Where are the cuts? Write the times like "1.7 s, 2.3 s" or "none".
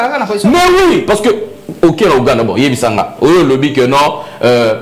none